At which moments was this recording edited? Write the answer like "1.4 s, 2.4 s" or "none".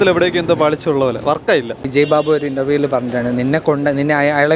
1.8 s